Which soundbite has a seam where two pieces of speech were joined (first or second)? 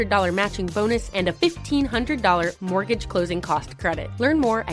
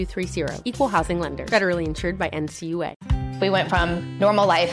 second